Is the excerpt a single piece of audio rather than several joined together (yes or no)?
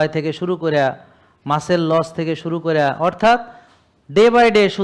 yes